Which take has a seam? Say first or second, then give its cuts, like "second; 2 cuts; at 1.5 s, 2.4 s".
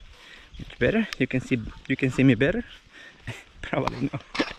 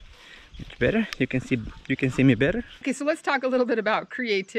second; 1 cut; at 2.7 s